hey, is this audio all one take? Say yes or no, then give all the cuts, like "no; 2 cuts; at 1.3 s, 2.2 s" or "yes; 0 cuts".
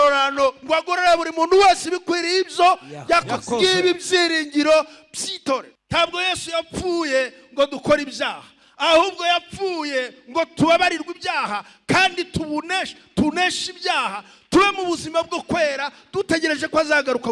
no; 1 cut; at 5.8 s